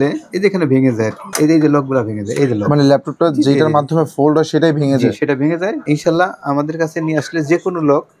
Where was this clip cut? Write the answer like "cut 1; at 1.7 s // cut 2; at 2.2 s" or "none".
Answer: cut 1; at 1.3 s // cut 2; at 5.8 s